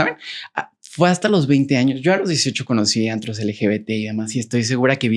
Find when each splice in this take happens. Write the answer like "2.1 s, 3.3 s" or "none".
none